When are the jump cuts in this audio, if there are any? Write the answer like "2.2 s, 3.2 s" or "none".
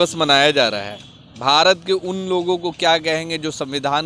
none

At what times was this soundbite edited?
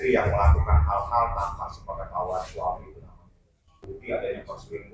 3.9 s

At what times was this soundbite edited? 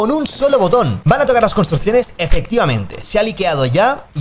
1.0 s

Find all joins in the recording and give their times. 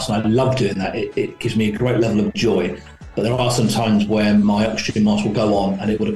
none

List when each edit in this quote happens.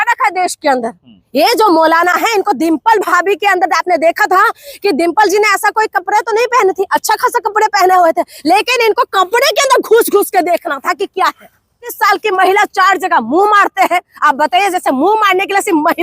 12.0 s

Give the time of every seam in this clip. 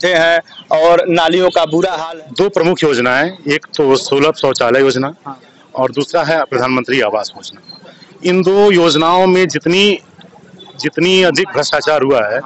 2.0 s

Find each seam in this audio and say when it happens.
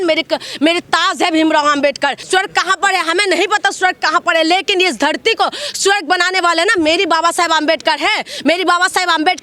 2.2 s

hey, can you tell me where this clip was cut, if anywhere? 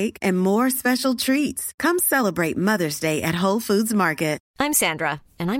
4.4 s

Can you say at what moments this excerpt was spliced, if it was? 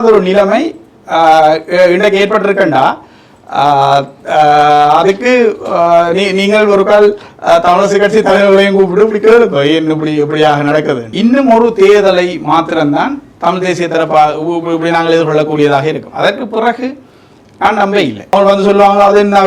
11.1 s, 18.3 s

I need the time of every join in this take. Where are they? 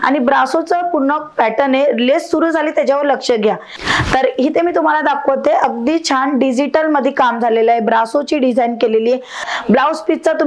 3.7 s, 9.4 s

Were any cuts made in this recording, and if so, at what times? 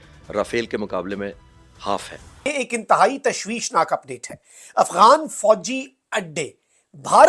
2.5 s

